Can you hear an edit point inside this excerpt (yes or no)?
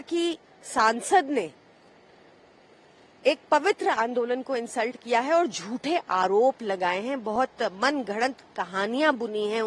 no